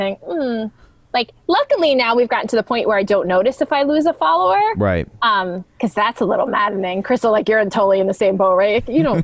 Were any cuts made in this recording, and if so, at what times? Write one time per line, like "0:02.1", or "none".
none

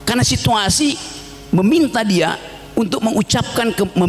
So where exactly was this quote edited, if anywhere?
none

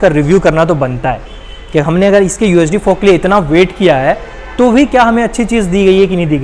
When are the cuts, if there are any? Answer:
none

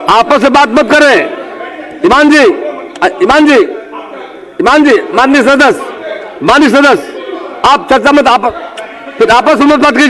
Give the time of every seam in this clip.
none

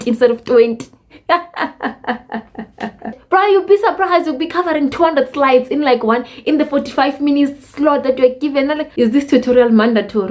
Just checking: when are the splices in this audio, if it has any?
0:03.1
0:08.8

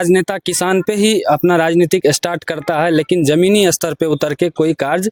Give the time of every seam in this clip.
none

